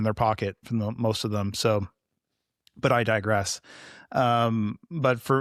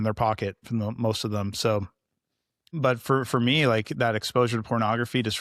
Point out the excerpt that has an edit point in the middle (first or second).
second